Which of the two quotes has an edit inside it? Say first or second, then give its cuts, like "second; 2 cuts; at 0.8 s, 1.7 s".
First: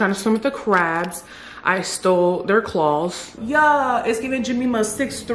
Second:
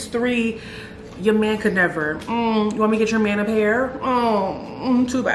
first; 1 cut; at 3.3 s